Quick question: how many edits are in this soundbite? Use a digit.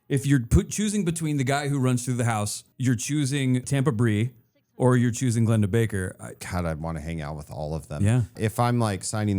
4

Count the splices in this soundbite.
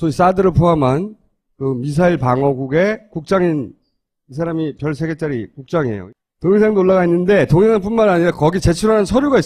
1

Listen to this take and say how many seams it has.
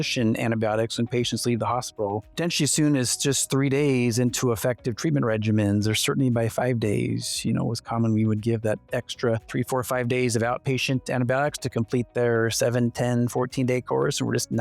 2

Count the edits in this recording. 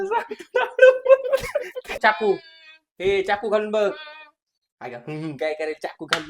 1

